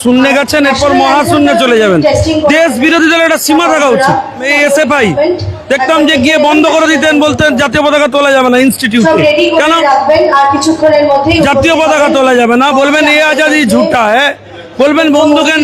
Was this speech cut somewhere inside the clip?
yes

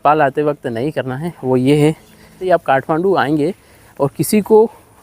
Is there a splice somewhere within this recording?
yes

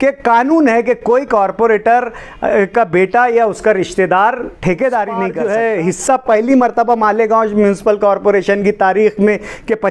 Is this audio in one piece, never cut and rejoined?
no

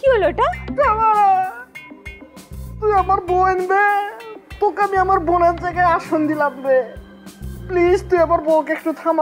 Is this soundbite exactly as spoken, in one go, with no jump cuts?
yes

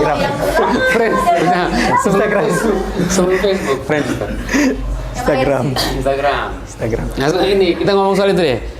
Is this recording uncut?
yes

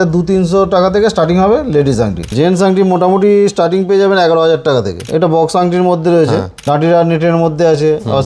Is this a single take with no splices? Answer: no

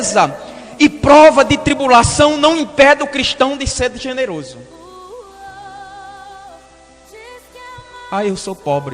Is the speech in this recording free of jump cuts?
no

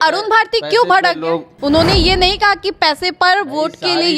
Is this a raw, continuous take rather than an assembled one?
no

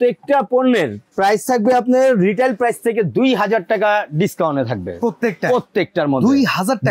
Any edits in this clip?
no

